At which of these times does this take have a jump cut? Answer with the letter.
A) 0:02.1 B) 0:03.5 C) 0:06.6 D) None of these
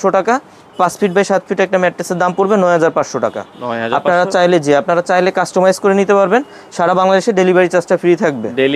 D